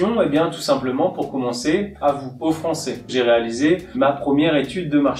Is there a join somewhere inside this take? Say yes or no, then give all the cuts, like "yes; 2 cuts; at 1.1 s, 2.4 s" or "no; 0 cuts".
yes; 1 cut; at 3.1 s